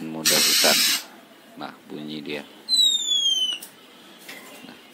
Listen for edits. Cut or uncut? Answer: uncut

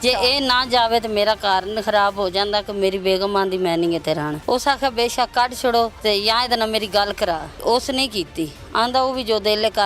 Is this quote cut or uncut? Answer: cut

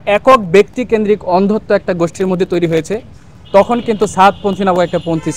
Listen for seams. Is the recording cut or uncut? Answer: uncut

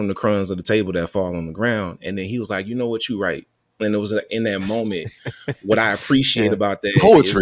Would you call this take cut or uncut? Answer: uncut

